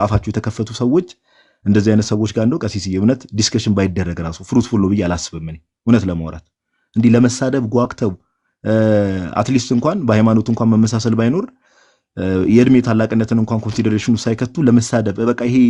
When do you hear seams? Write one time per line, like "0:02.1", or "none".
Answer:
none

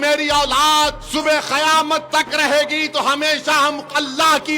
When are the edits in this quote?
0:01.0

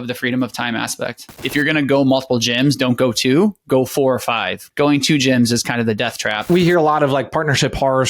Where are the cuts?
0:01.3
0:04.6
0:06.5

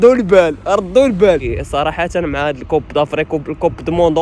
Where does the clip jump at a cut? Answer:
0:01.5

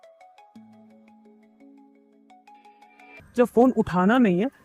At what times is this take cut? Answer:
0:03.2

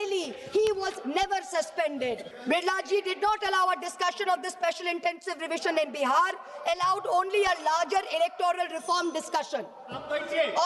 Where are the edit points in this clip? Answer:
0:02.3

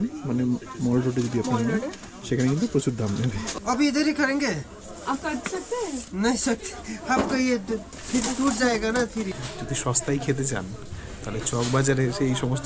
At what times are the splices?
0:03.5
0:09.3

